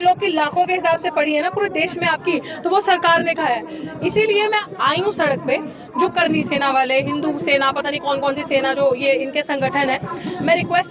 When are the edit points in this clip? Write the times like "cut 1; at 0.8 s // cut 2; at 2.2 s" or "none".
none